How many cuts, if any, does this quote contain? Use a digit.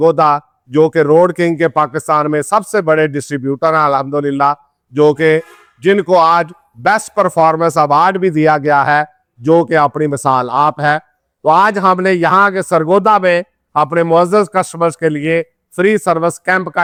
0